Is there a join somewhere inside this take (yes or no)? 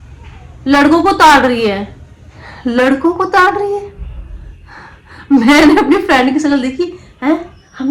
no